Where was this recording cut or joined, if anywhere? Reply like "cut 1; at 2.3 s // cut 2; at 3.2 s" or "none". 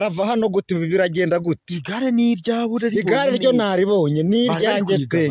none